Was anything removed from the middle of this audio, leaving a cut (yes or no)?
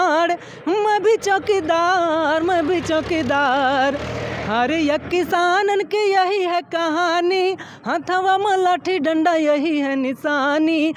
no